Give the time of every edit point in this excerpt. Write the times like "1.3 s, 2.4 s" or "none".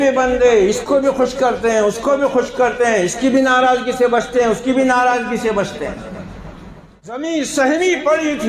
7.2 s